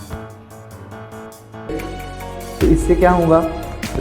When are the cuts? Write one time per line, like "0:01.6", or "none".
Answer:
0:01.7

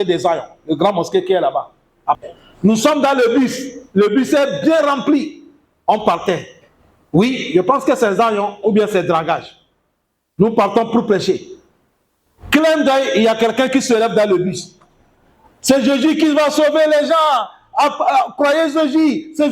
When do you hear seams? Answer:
0:02.2

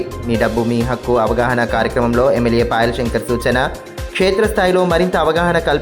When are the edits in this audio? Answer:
none

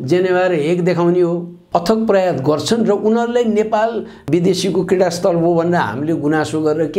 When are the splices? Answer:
0:01.5

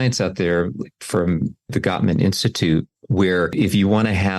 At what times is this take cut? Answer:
0:01.7

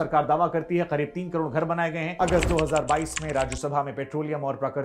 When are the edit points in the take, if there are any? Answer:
0:02.1

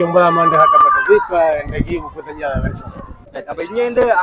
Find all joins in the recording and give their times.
0:03.2

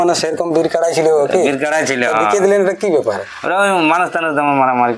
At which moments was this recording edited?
none

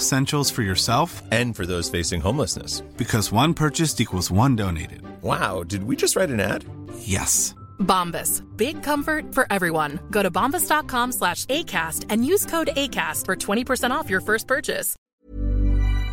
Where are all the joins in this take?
0:15.2

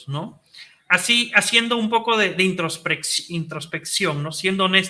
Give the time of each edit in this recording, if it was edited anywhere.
none

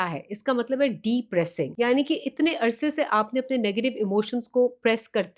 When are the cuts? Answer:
0:01.6

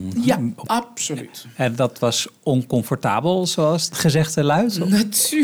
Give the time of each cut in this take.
0:03.9

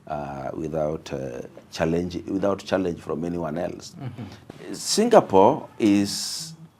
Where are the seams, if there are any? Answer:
0:04.3

